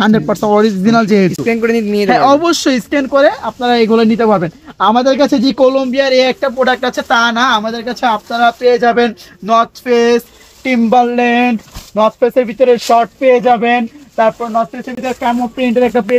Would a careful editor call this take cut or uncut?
uncut